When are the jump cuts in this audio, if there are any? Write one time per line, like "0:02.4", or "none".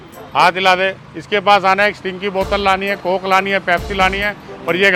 none